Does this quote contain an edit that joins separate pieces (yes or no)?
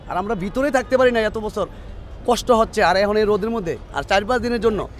no